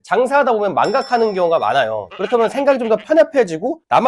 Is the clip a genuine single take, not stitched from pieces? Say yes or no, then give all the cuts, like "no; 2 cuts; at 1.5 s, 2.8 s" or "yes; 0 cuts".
no; 1 cut; at 2.1 s